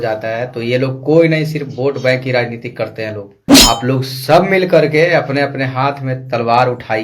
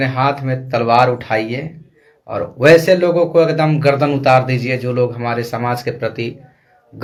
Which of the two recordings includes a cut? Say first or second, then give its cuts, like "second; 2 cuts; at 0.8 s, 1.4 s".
first; 1 cut; at 3.4 s